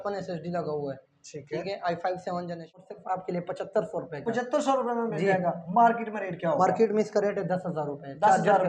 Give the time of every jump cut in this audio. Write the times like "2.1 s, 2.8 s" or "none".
2.8 s